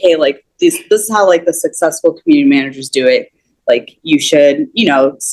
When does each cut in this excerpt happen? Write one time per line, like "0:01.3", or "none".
none